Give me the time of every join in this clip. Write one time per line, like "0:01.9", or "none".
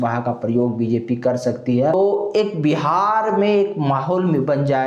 0:01.9

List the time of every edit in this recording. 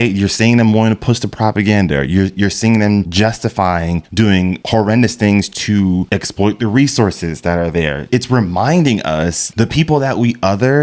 0:03.1
0:04.3
0:06.1
0:08.1
0:09.4

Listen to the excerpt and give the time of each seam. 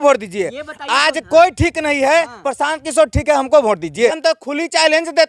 0:04.1

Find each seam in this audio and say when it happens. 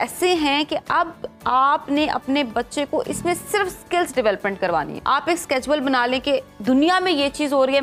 0:04.9

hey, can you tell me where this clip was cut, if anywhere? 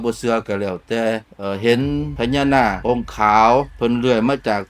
0:01.3

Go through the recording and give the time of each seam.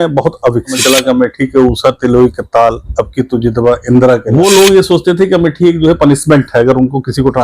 0:00.8
0:04.3

